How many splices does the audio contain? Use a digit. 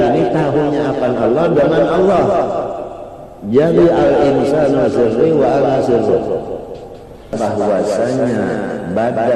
1